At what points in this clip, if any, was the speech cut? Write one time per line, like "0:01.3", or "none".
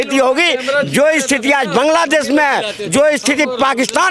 none